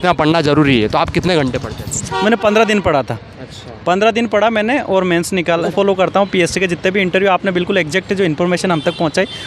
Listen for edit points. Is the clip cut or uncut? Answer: cut